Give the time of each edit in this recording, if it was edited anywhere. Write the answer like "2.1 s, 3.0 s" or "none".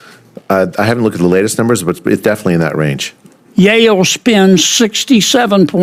none